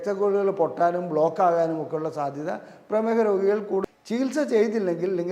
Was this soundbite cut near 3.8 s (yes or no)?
yes